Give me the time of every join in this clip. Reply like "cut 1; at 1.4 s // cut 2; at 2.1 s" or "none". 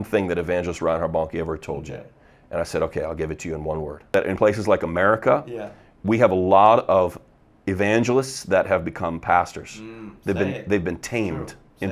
cut 1; at 4.1 s

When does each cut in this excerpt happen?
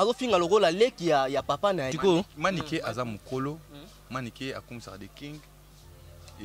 cut 1; at 1.9 s

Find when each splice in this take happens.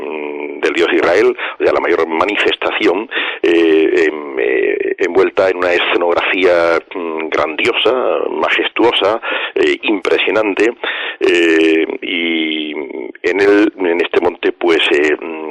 cut 1; at 3.2 s

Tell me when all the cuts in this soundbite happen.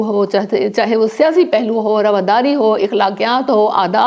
none

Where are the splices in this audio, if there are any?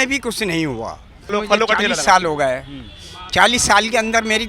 cut 1; at 1.3 s

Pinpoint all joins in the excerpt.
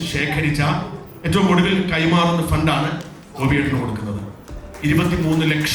none

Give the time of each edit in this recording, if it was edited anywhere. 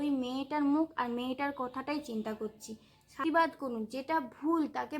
cut 1; at 3.2 s

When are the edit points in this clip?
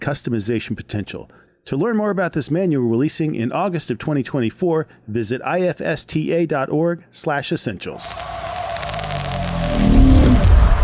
cut 1; at 8.1 s

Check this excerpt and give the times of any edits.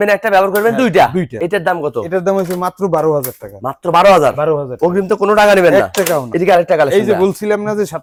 none

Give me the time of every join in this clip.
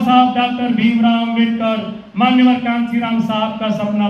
none

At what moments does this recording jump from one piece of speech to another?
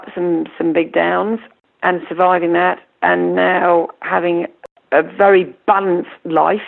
cut 1; at 1.5 s // cut 2; at 4.6 s

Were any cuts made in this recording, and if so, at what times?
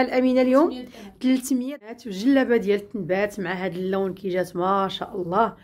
cut 1; at 1.9 s

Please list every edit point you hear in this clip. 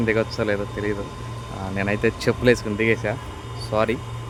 none

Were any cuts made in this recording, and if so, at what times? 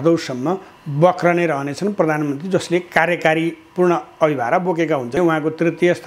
cut 1; at 5.2 s

